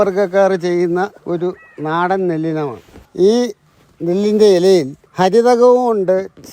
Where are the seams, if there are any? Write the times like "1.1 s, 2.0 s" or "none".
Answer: 1.2 s, 3.0 s